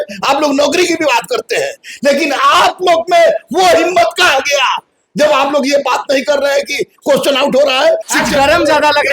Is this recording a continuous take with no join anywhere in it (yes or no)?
no